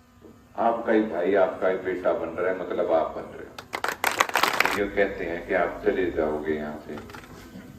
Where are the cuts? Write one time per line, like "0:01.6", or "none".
0:04.7